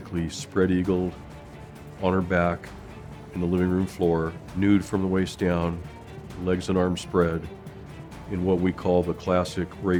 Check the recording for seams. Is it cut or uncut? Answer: uncut